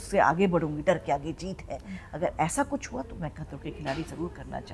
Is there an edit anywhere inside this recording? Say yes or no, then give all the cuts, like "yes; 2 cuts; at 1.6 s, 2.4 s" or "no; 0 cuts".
no; 0 cuts